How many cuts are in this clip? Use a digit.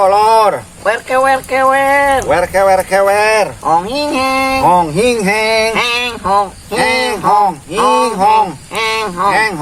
0